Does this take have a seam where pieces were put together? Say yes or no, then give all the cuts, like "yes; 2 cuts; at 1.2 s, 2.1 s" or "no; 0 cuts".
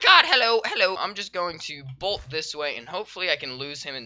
yes; 1 cut; at 1.0 s